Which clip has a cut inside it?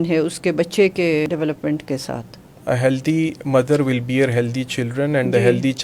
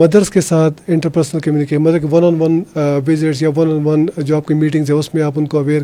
first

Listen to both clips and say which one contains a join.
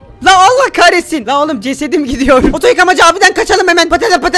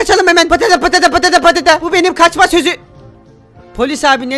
first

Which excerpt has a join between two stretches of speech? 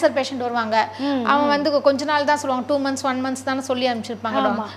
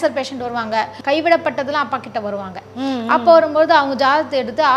second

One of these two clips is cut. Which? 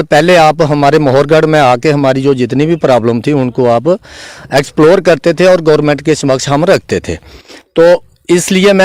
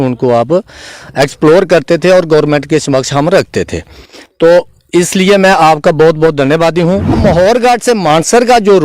second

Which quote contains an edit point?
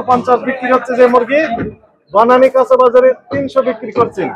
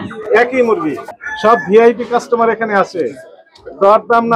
second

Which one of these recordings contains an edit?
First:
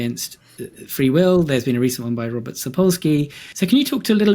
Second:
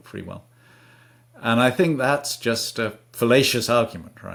first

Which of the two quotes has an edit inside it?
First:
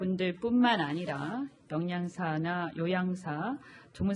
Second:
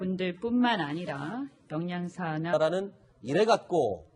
first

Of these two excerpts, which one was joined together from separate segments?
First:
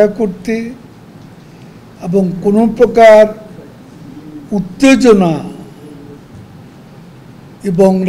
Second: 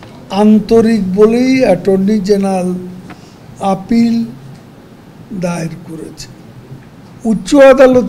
second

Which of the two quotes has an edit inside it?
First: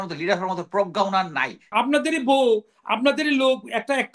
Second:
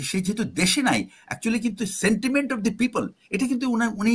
first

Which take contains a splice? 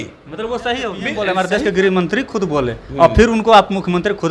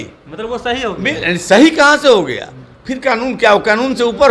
first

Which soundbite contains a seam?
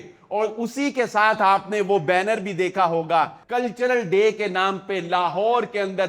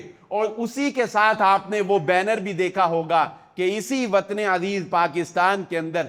first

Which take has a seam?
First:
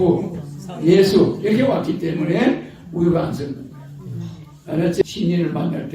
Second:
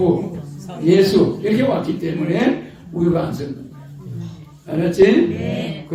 first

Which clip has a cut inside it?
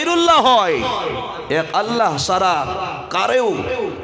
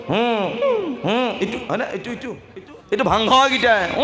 second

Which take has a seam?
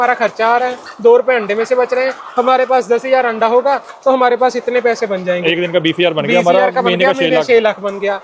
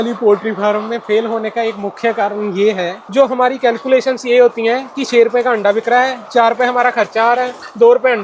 second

